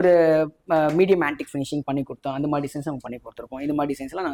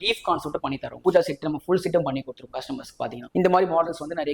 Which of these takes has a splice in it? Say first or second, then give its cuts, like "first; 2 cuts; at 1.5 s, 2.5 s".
second; 2 cuts; at 1.0 s, 3.2 s